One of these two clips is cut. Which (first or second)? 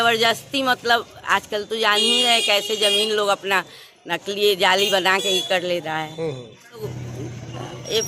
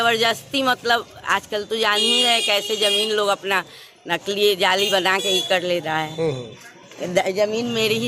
first